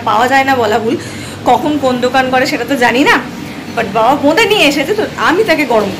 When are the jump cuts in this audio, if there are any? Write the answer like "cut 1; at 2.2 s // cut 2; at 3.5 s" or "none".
none